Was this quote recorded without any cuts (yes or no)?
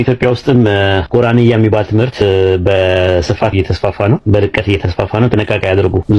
yes